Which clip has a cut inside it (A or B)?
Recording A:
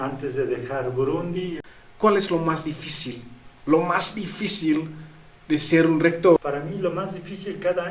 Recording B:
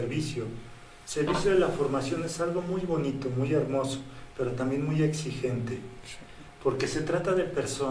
A